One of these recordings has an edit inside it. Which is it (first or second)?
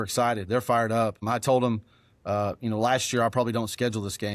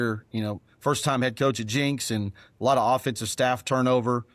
first